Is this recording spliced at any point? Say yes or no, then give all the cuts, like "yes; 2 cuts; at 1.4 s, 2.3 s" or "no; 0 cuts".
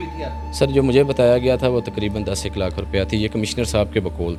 no; 0 cuts